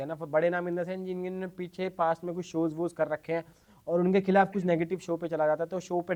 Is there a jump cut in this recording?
no; 0 cuts

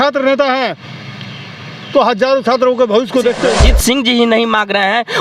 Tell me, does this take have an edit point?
yes; 1 cut; at 3.7 s

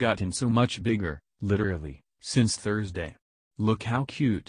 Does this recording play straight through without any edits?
yes; 0 cuts

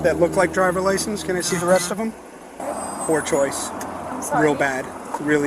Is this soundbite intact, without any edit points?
no; 1 cut; at 2.6 s

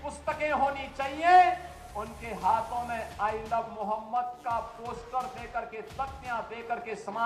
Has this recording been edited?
no; 0 cuts

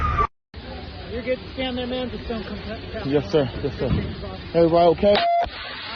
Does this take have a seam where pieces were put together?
no; 0 cuts

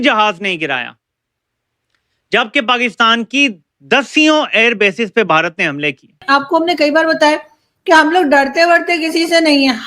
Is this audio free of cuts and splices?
no; 1 cut; at 6.2 s

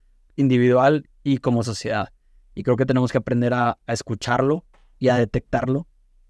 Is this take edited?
no; 0 cuts

